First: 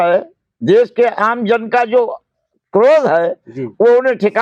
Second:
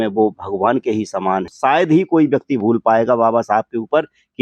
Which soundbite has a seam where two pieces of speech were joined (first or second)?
second